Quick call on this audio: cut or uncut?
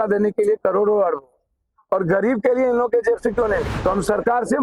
cut